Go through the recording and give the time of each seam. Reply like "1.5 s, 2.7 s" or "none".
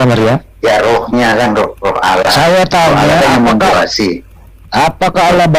none